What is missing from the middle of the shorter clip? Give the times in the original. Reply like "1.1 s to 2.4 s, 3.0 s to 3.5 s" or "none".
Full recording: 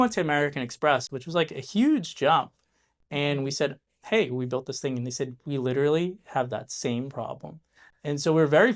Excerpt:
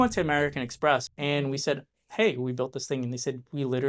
1.1 s to 3.0 s

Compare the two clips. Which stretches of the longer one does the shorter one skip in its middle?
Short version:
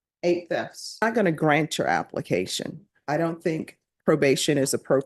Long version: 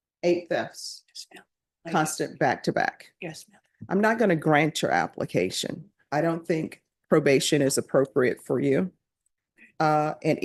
1.0 s to 4.1 s

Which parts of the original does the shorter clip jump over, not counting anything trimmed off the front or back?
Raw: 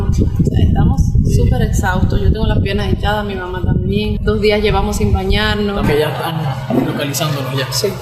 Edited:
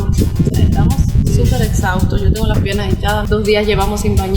3.2 s to 4.2 s

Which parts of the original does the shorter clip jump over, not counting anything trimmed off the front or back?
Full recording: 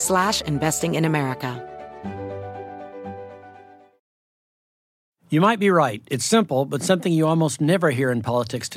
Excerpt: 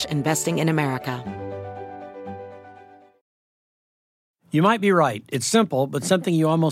1.5 s to 2.0 s

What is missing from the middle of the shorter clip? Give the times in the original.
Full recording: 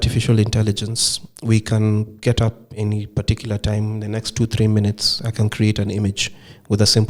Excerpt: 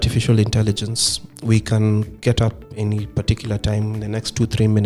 none

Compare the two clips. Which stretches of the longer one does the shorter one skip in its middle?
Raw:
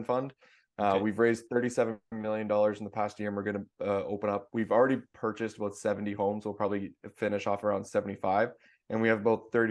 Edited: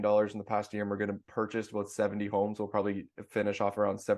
3.7 s to 5.1 s

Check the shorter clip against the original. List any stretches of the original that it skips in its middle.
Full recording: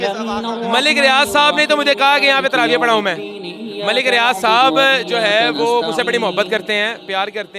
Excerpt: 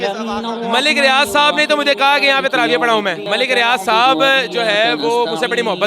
3.2 s to 3.8 s

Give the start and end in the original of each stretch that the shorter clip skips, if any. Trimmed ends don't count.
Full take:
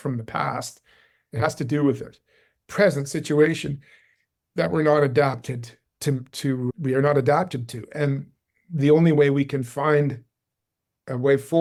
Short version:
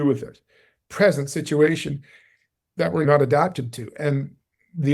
4.8 s to 7.0 s

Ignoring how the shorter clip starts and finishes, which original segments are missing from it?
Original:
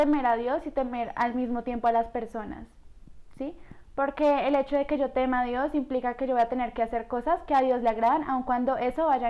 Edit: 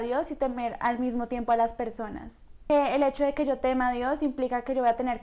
3.0 s to 4.2 s

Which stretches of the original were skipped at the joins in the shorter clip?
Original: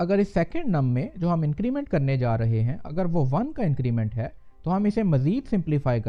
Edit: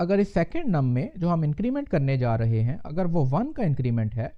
none

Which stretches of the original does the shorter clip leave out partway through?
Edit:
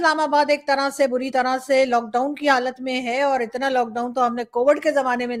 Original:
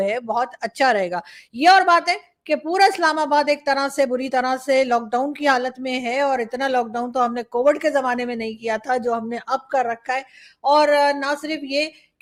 none

